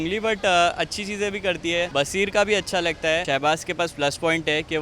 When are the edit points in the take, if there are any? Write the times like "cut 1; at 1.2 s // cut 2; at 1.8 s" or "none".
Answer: cut 1; at 1.9 s // cut 2; at 3.2 s

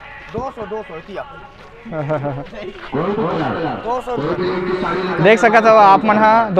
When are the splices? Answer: none

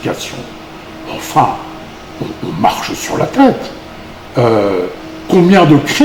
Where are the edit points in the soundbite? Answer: none

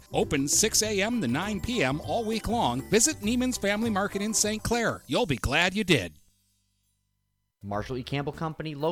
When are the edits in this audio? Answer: cut 1; at 7.5 s

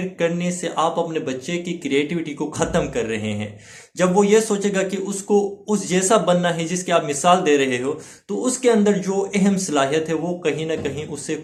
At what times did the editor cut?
none

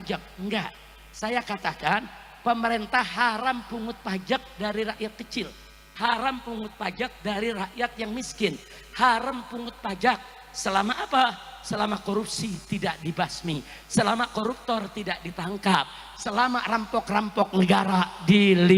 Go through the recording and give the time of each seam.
none

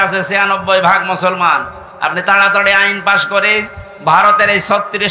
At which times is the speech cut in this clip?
none

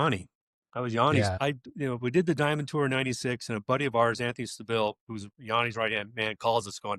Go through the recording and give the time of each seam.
cut 1; at 1.4 s

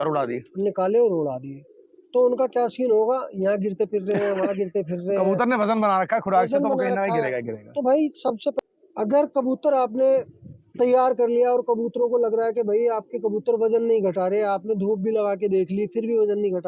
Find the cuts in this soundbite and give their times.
cut 1; at 8.6 s

